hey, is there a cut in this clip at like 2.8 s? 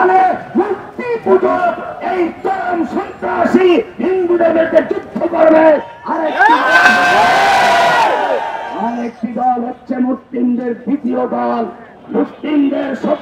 no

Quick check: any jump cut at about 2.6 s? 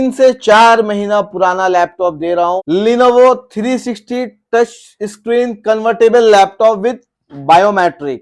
yes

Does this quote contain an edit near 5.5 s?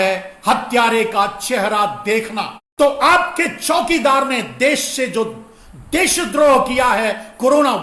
no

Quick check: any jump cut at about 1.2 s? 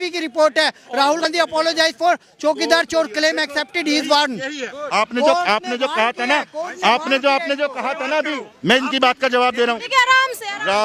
yes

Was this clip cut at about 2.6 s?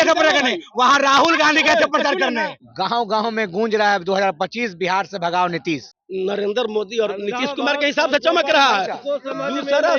yes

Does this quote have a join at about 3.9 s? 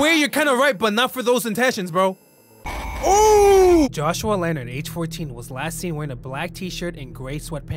yes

